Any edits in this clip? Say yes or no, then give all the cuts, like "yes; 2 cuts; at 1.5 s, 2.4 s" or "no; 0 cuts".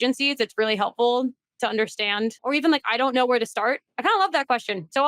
yes; 2 cuts; at 2.4 s, 3.9 s